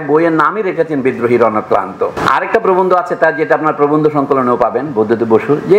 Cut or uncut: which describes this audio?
cut